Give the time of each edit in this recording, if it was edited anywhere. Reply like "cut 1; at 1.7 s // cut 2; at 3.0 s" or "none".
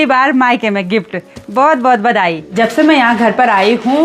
cut 1; at 2.6 s